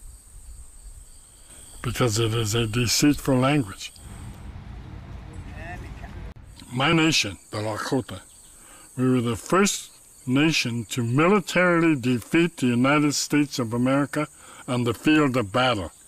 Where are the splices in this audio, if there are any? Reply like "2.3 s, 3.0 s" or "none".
none